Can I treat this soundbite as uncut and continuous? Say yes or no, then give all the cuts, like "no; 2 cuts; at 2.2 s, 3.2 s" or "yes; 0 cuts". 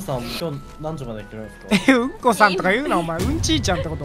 yes; 0 cuts